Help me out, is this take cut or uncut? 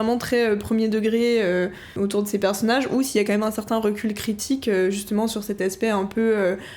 cut